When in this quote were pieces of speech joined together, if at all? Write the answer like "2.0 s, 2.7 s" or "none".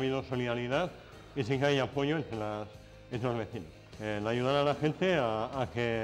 3.7 s